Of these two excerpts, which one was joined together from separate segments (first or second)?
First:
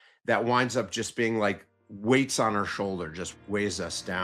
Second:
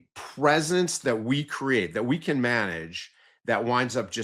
first